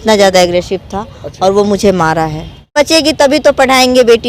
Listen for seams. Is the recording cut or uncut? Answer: cut